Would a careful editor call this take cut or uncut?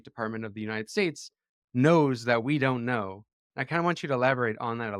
uncut